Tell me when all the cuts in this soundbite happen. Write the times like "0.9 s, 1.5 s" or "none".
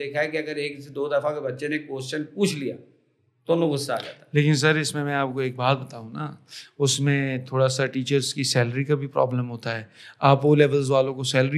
none